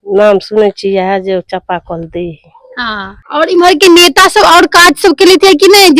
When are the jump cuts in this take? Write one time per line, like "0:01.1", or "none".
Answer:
0:03.1